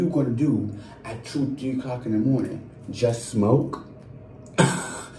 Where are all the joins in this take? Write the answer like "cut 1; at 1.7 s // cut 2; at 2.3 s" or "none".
none